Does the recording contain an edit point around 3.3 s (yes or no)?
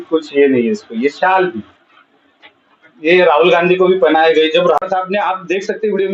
no